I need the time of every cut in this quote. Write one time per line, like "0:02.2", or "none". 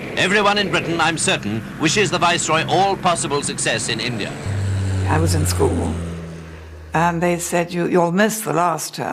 none